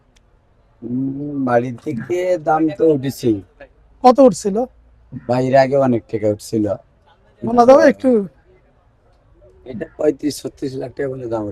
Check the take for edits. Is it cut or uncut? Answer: uncut